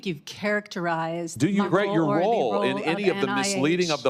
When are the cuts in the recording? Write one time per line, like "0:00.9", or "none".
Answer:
0:01.7